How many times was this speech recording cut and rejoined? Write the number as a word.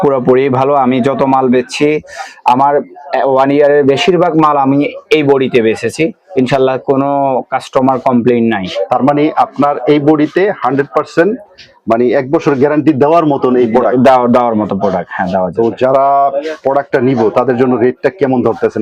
zero